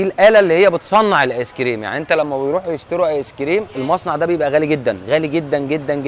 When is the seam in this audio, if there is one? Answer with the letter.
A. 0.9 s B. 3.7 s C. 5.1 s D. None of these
B